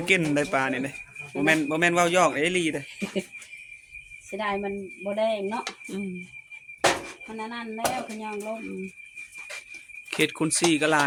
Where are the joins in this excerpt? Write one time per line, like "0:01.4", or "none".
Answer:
none